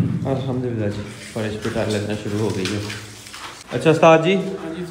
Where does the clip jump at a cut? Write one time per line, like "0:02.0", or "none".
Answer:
none